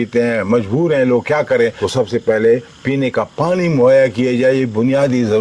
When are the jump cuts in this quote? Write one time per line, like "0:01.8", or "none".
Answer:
0:01.8